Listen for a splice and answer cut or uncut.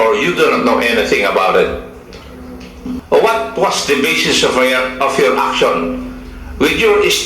cut